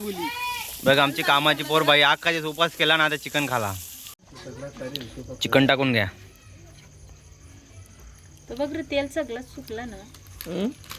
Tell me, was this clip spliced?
yes; 1 cut; at 4.2 s

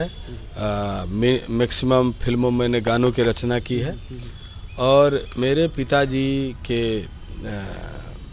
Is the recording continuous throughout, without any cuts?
yes; 0 cuts

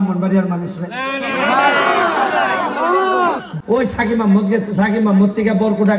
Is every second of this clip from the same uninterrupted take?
no; 1 cut; at 3.5 s

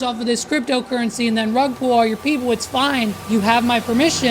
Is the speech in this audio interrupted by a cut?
yes; 1 cut; at 3.2 s

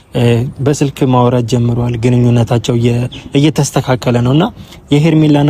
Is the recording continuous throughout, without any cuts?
yes; 0 cuts

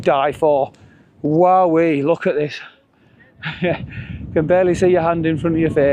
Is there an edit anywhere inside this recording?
no; 0 cuts

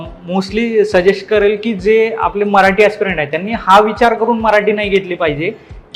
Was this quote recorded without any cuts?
yes; 0 cuts

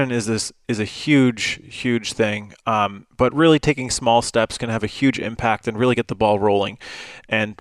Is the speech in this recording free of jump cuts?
yes; 0 cuts

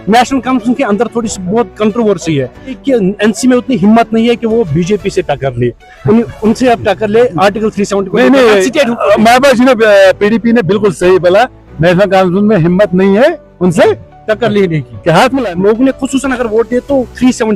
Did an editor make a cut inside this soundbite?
yes; 2 cuts; at 2.7 s, 15.4 s

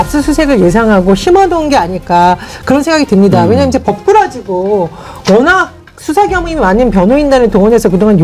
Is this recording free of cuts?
yes; 0 cuts

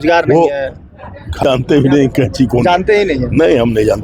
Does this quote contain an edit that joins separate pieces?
yes; 1 cut; at 1.4 s

